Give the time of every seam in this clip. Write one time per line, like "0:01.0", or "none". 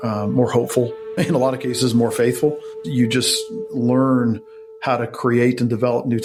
none